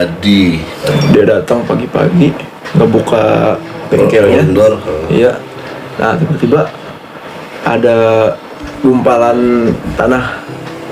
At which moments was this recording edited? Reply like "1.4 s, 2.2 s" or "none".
0.9 s